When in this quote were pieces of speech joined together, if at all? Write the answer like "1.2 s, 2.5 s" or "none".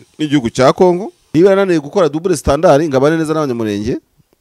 1.1 s